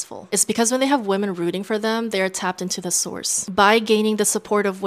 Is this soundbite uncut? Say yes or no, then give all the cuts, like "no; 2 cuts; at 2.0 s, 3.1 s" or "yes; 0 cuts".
no; 1 cut; at 3.4 s